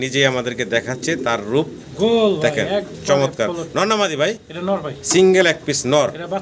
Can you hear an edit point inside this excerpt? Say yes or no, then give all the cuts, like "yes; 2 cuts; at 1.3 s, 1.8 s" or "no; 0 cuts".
no; 0 cuts